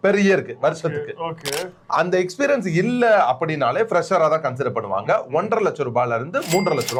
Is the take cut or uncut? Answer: uncut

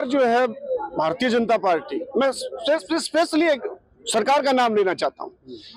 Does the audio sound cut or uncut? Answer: uncut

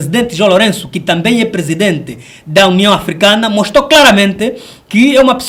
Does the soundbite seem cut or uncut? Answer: uncut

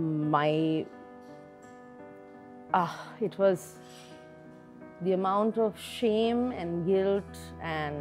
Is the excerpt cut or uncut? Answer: cut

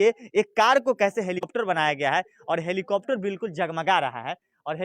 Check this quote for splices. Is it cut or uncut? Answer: cut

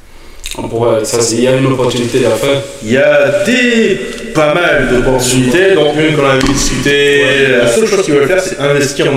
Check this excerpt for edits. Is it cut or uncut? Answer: cut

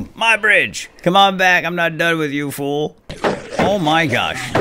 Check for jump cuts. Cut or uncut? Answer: cut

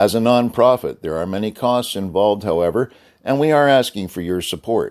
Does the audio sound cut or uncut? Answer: uncut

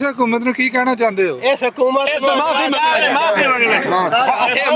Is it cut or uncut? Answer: uncut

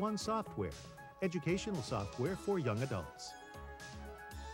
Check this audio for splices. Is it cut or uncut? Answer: cut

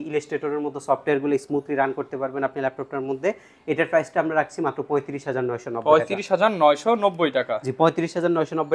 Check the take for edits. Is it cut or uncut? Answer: uncut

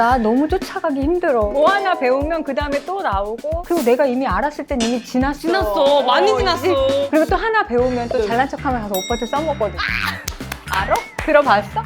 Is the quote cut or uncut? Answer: cut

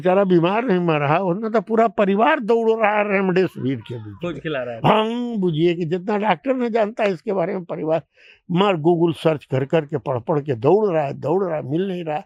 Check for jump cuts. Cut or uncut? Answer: uncut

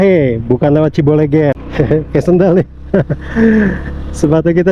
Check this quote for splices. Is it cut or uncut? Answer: cut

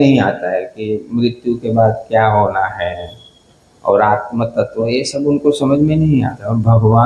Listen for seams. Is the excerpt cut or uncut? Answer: uncut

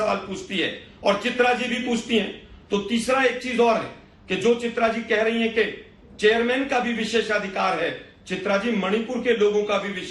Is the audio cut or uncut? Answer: uncut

